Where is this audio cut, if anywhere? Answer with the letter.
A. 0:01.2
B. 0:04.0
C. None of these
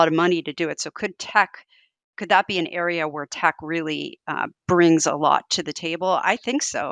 C